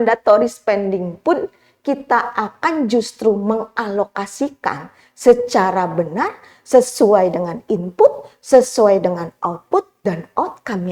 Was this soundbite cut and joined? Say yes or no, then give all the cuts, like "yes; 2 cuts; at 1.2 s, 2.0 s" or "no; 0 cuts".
no; 0 cuts